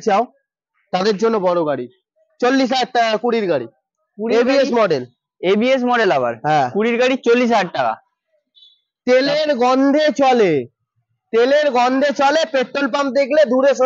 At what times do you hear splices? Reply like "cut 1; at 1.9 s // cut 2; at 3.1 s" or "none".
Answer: none